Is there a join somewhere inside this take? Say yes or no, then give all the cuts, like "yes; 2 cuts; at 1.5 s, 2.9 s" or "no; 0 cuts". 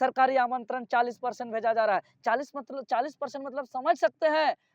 no; 0 cuts